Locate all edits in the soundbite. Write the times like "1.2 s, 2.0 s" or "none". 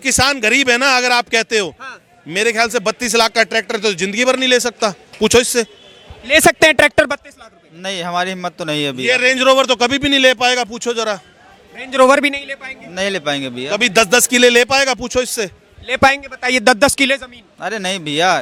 none